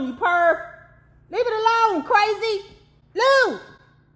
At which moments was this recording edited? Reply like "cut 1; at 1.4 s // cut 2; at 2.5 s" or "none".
none